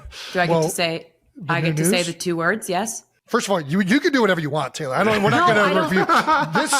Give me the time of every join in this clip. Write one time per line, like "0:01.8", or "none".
0:03.2